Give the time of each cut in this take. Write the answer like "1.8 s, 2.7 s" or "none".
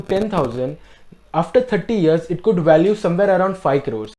none